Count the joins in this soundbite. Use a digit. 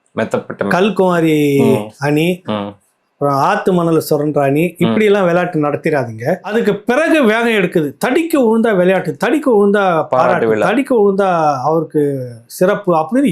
1